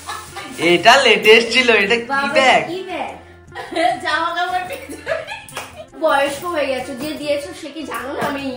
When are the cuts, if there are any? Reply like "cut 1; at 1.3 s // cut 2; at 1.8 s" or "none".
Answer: cut 1; at 6.0 s